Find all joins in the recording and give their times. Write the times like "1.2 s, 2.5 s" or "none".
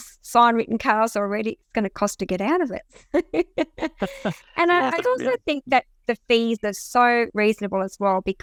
none